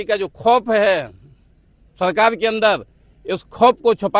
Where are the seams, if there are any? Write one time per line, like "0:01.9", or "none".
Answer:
none